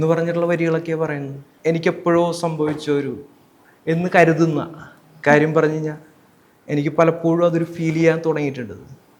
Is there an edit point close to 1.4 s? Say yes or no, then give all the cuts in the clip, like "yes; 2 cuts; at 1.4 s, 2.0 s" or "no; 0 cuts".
yes; 1 cut; at 1.4 s